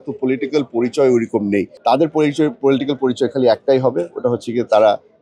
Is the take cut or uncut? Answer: cut